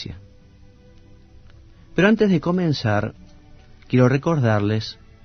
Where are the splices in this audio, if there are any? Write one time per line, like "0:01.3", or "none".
0:03.2